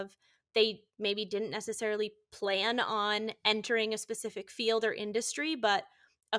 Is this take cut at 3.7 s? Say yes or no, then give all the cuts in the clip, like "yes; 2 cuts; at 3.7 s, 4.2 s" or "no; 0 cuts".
no; 0 cuts